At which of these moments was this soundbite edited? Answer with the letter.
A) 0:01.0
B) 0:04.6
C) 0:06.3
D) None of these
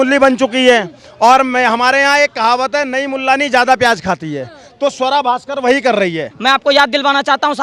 C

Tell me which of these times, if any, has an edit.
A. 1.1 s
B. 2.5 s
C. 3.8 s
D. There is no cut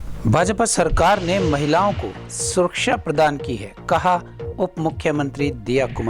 D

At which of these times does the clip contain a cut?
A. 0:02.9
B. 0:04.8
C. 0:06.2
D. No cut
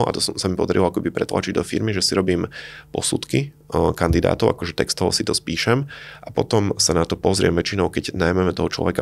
D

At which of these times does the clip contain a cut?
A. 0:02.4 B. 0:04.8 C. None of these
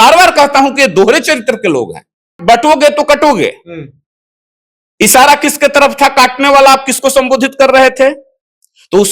A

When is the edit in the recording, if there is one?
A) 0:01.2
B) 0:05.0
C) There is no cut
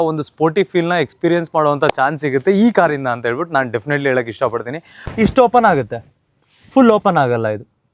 B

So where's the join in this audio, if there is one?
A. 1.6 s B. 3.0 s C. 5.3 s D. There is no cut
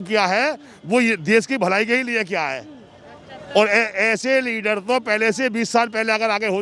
D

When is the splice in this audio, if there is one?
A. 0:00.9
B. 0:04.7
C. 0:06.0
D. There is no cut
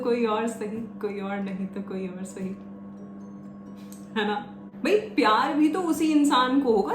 B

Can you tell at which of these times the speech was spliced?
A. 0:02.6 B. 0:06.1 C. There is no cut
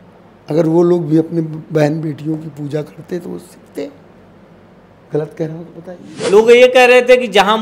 B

